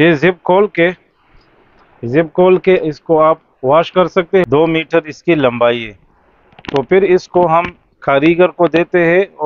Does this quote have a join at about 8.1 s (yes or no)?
no